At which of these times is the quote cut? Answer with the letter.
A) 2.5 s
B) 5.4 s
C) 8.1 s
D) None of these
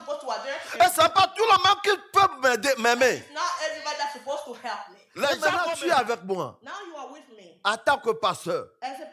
B